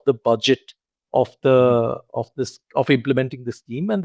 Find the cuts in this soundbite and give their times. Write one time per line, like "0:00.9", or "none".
none